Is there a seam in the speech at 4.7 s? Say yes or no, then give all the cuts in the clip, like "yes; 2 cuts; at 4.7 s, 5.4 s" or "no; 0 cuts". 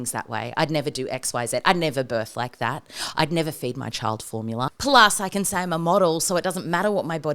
yes; 1 cut; at 4.7 s